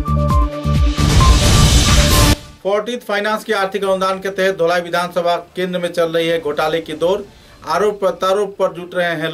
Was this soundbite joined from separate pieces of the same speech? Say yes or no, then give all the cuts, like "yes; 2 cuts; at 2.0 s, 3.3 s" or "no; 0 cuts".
no; 0 cuts